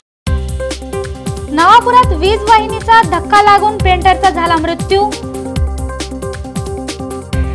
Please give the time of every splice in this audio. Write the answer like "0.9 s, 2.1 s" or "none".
1.1 s